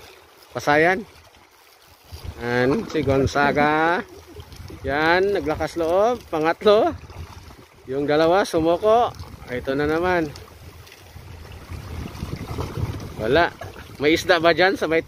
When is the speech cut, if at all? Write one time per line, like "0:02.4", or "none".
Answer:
0:02.5